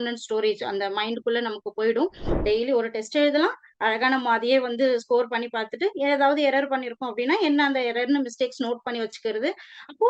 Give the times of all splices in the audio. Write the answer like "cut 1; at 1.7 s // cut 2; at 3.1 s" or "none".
cut 1; at 2.3 s